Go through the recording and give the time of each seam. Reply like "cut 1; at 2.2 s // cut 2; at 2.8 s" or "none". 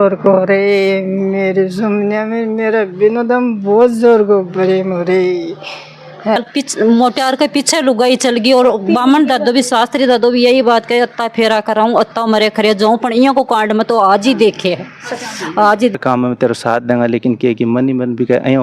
cut 1; at 6.4 s // cut 2; at 15.9 s